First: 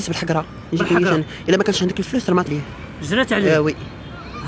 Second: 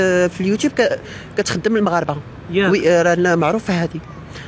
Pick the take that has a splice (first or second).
first